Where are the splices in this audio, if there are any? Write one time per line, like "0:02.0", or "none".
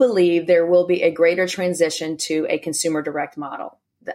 none